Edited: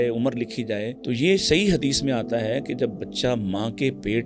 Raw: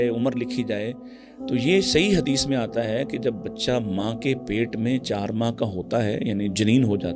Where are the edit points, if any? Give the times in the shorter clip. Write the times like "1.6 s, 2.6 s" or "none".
1.0 s